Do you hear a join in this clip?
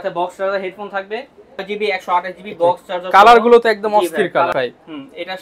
yes; 2 cuts; at 1.6 s, 4.5 s

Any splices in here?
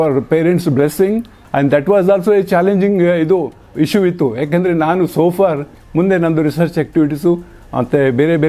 yes; 2 cuts; at 1.4 s, 5.8 s

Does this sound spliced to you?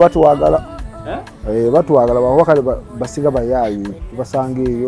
no; 0 cuts

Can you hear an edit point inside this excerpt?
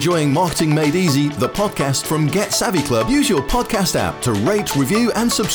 no; 0 cuts

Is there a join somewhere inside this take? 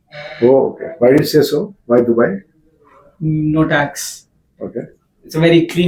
no; 0 cuts

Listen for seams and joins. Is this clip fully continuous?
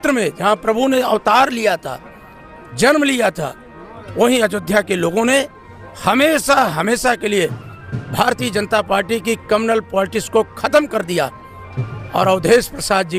yes; 0 cuts

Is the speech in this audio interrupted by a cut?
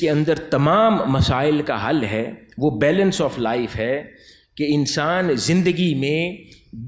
no; 0 cuts

